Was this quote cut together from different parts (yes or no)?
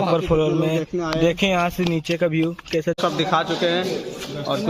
yes